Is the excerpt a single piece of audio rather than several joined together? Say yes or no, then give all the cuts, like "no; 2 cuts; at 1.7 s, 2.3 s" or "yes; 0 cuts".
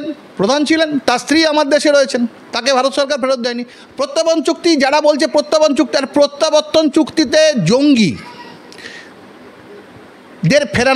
no; 1 cut; at 3.7 s